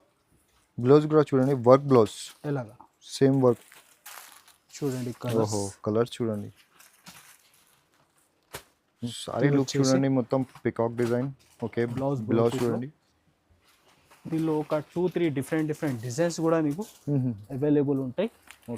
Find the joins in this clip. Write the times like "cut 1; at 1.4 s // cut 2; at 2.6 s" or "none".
cut 1; at 9.1 s